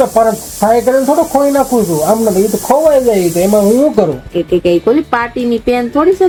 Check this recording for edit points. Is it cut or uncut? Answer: uncut